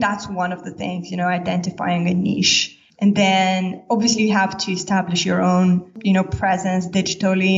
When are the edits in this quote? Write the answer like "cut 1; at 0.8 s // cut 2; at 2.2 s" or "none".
cut 1; at 5.9 s